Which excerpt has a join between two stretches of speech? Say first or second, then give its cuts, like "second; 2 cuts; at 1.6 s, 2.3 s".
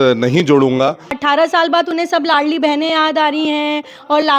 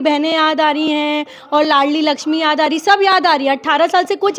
first; 1 cut; at 1.1 s